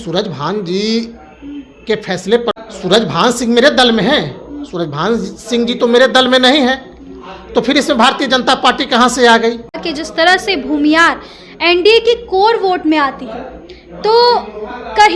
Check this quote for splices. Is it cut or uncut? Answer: cut